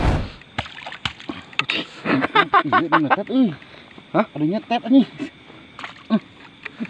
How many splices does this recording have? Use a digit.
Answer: 0